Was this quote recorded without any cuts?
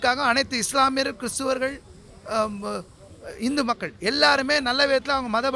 yes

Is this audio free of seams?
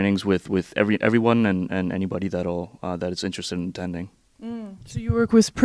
no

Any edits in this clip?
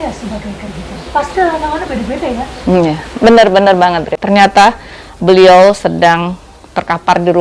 yes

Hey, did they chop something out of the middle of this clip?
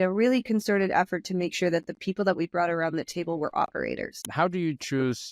yes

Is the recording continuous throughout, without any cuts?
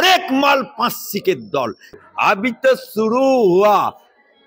no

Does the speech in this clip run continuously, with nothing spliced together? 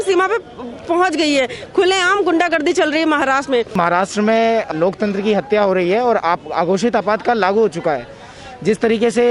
no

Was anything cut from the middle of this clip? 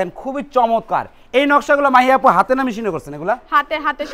no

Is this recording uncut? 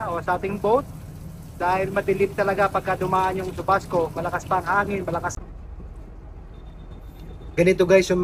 no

